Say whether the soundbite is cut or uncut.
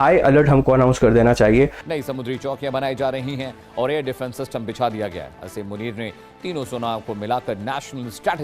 cut